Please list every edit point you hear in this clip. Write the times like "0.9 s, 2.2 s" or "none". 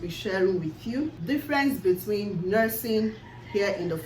1.2 s